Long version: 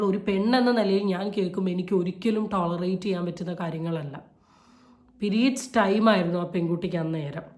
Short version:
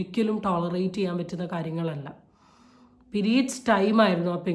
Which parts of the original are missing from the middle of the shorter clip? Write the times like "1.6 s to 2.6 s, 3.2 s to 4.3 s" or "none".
none